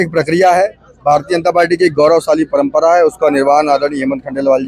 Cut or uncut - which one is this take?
uncut